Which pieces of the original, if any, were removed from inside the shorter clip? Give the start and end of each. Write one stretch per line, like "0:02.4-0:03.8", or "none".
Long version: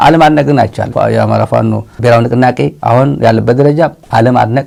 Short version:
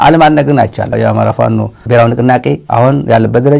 0:00.9-0:01.1

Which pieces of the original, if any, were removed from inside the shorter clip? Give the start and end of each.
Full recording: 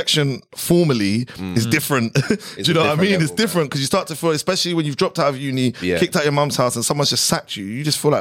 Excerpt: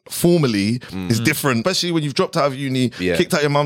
0:02.1-0:04.4

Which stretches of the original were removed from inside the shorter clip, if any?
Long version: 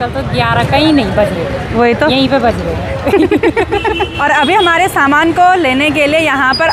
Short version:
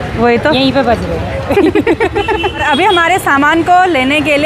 0:04.1-0:04.3

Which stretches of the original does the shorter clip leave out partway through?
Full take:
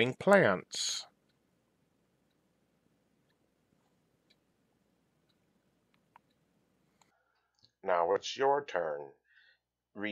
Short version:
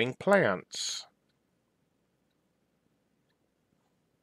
none

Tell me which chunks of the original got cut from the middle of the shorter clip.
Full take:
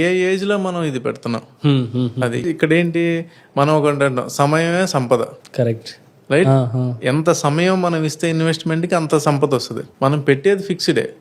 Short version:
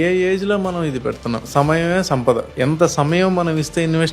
0:01.5-0:04.3
0:05.3-0:07.0

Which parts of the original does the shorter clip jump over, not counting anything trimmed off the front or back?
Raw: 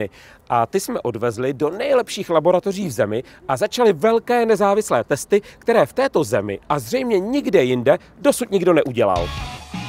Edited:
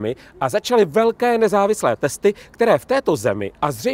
none

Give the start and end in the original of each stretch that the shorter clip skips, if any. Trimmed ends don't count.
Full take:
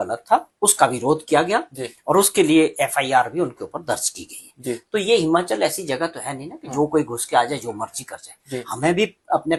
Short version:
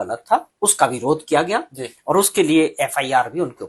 none

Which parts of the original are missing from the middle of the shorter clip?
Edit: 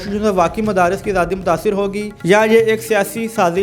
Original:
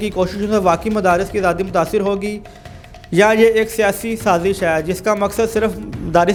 0:02.4-0:03.0

